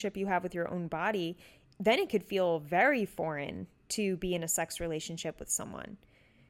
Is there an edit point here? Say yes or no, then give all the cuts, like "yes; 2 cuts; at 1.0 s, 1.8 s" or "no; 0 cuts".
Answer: no; 0 cuts